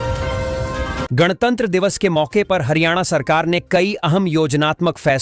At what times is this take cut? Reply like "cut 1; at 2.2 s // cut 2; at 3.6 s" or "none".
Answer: cut 1; at 1.1 s